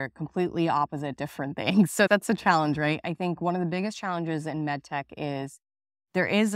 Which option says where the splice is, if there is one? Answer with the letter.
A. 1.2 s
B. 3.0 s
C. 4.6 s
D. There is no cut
D